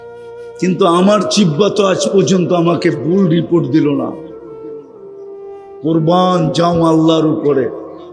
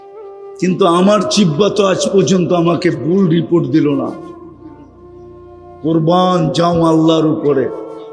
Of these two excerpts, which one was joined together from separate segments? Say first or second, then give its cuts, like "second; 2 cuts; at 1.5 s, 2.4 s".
first; 2 cuts; at 4.2 s, 5.8 s